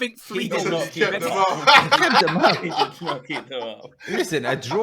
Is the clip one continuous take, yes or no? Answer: yes